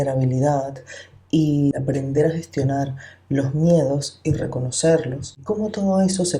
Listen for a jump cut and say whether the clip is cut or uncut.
cut